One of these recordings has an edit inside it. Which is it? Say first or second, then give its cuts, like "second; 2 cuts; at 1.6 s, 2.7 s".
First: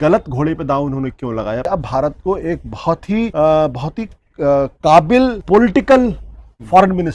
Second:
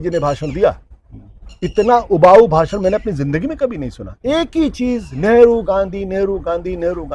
first; 3 cuts; at 1.7 s, 3.3 s, 5.4 s